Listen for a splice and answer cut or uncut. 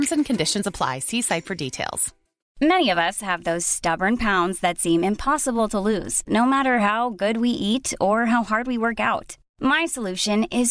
cut